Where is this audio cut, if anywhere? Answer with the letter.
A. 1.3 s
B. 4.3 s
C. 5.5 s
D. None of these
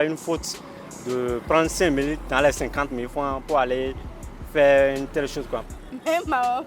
C